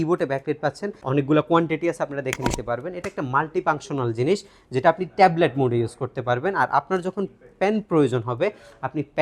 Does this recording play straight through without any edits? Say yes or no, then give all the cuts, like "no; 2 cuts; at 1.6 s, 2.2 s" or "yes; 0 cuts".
no; 1 cut; at 0.9 s